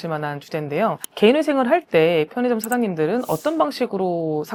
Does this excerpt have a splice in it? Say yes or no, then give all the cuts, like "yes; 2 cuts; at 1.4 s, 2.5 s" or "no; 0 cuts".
no; 0 cuts